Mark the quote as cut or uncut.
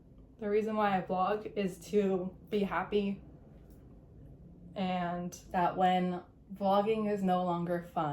cut